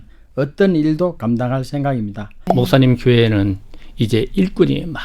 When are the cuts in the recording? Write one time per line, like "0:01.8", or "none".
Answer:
0:02.5